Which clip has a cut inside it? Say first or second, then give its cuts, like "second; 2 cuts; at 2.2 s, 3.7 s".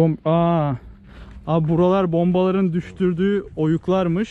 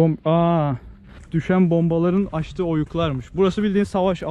second; 1 cut; at 1.3 s